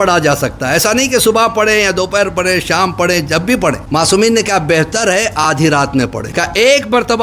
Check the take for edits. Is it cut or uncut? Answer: cut